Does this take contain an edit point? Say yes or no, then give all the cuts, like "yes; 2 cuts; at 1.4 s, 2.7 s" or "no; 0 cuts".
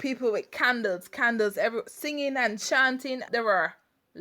yes; 1 cut; at 3.3 s